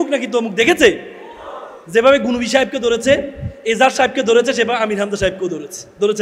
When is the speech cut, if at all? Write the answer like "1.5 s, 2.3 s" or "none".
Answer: none